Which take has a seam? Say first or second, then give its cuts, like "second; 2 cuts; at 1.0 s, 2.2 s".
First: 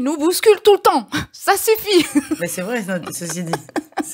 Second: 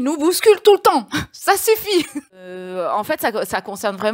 second; 1 cut; at 2.5 s